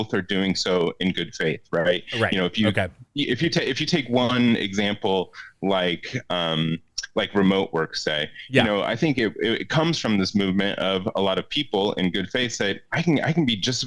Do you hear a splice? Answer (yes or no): no